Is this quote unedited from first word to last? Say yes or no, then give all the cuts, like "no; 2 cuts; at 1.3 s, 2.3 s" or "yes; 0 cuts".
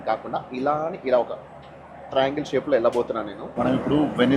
no; 1 cut; at 3.4 s